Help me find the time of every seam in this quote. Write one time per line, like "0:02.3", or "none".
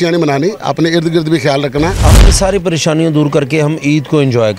0:02.1

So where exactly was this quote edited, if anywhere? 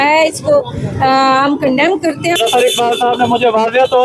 0:02.4

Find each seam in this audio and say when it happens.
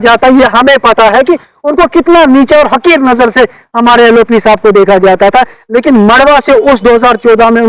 none

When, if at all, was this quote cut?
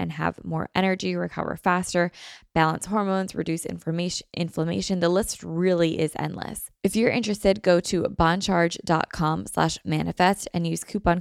0:06.6

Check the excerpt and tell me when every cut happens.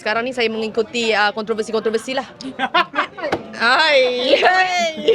none

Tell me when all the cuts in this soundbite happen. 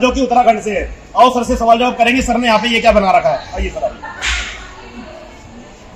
none

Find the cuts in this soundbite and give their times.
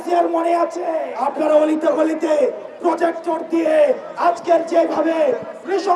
0:01.1

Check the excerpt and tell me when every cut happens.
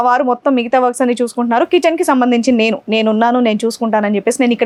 none

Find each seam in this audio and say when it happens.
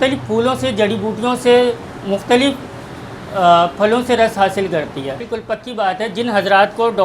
0:05.2

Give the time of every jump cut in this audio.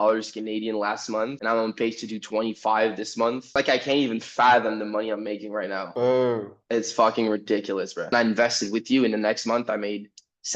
0:08.1

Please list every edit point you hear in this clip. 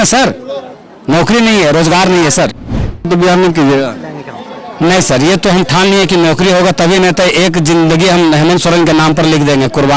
0:03.1

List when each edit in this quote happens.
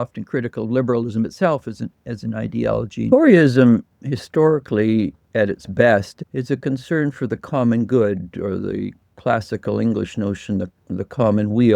0:03.1
0:06.2

